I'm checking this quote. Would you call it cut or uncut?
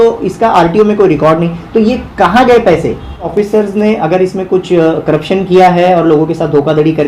cut